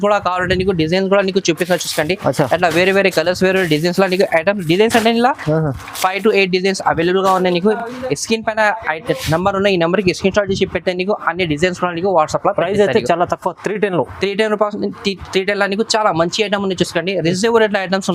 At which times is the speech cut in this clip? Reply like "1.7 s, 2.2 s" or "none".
none